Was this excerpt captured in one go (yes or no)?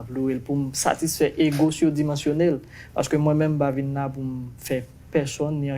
yes